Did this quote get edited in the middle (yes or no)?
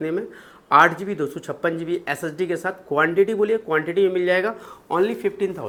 no